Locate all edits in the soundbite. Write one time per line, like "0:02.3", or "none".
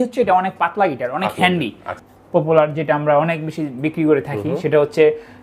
0:01.9